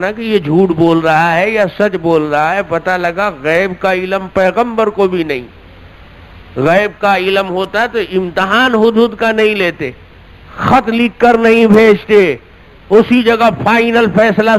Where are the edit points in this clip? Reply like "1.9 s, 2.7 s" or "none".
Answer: none